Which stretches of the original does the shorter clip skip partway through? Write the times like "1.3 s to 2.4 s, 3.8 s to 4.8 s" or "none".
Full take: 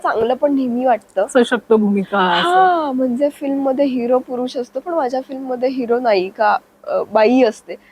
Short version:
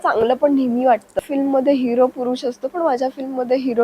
1.2 s to 3.3 s

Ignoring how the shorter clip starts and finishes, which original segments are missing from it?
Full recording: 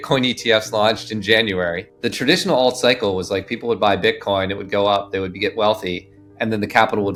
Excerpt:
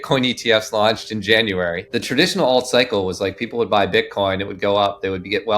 1.9 s to 2.0 s

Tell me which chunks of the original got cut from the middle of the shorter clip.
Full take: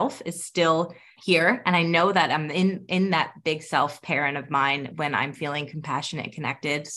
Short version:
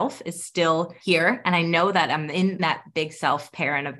0.9 s to 1.2 s, 2.8 s to 3.1 s

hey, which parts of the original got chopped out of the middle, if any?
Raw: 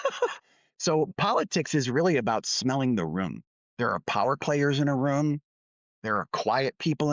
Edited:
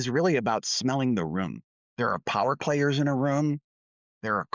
none

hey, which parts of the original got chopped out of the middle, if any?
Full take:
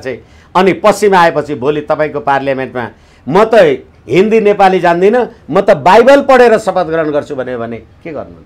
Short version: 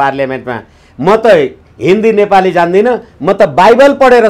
none

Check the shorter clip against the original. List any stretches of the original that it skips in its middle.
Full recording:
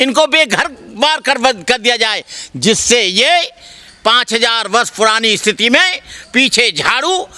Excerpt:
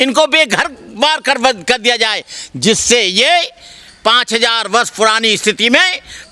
none

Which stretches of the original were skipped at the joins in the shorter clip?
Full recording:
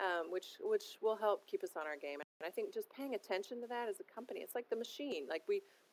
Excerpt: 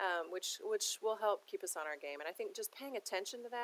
2.2 s to 2.4 s

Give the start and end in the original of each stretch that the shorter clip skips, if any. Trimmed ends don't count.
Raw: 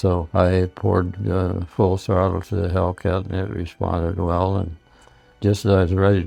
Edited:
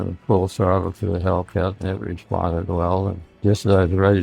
4.7 s to 5.2 s

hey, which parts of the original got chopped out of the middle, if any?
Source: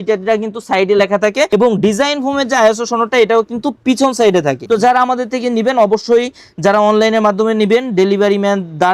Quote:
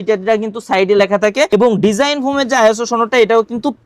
none

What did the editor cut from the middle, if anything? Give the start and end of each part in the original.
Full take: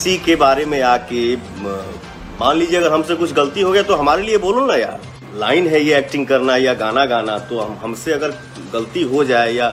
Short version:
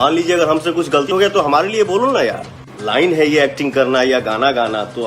3.5 s to 3.6 s

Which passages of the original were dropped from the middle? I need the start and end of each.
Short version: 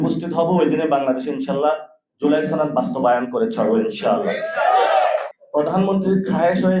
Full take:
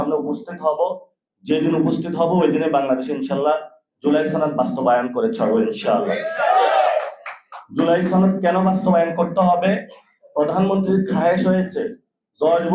7.2 s to 10.2 s

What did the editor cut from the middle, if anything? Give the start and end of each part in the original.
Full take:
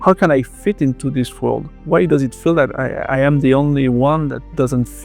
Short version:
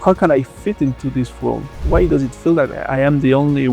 2.8 s to 3.0 s

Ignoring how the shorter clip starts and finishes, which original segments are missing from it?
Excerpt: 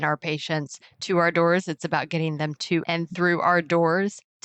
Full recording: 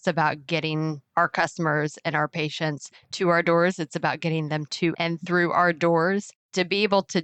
none

